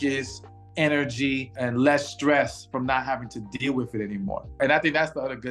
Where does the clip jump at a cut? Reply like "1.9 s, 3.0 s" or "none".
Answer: 1.5 s, 4.6 s